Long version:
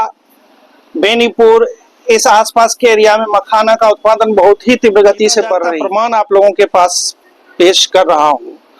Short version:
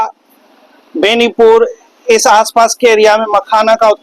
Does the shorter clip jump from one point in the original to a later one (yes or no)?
no